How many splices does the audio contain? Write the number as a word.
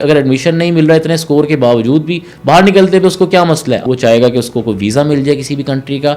one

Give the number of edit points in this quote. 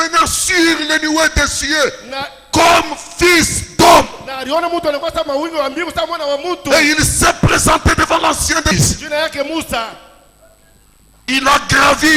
one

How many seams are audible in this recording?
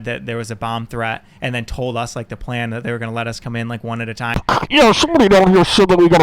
one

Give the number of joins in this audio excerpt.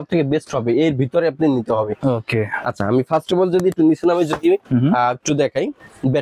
zero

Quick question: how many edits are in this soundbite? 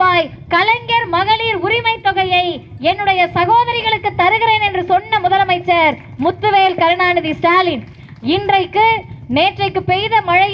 zero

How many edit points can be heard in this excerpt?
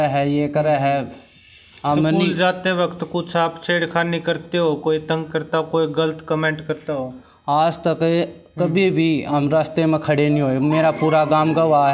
zero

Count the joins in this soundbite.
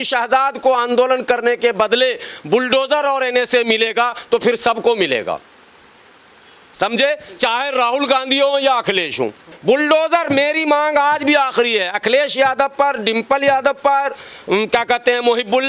one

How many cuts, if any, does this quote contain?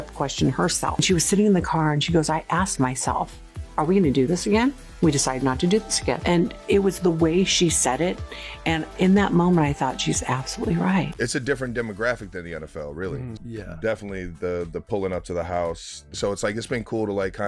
one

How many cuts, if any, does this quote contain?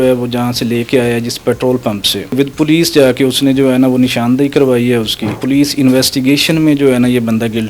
two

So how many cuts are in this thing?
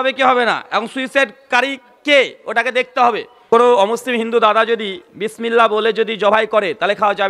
one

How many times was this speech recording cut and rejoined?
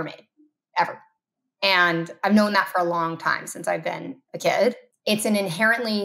one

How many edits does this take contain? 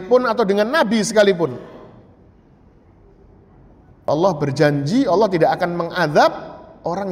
one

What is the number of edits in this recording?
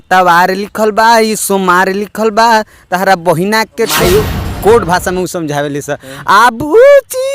one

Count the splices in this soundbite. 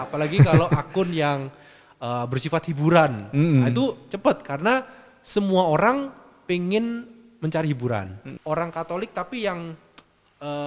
one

